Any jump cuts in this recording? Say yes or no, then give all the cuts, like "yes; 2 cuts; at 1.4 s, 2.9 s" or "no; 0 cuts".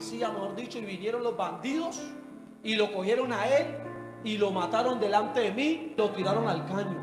yes; 1 cut; at 6.0 s